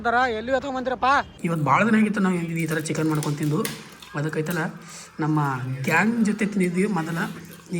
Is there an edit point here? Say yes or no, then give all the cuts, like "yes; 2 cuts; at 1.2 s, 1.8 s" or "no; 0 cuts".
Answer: yes; 1 cut; at 1.4 s